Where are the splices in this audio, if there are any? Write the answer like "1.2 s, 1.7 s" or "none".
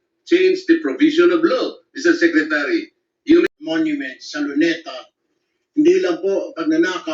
3.5 s